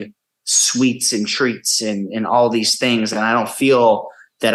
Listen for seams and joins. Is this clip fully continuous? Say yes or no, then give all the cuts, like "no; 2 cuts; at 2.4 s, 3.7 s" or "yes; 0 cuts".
yes; 0 cuts